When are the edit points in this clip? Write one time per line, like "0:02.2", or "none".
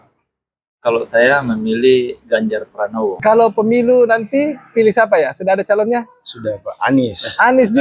0:03.2